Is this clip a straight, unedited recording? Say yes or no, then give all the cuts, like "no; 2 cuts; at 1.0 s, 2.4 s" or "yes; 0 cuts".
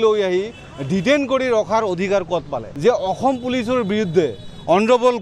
no; 1 cut; at 2.6 s